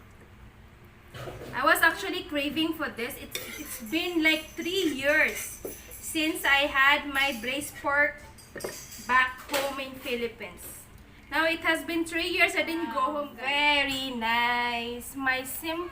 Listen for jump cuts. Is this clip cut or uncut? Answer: cut